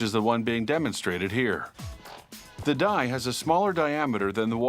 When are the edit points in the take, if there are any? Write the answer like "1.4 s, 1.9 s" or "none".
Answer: 1.8 s